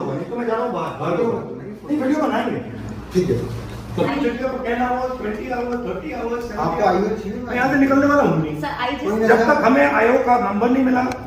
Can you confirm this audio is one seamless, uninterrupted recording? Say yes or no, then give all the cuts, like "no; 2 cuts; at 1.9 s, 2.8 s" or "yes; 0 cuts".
yes; 0 cuts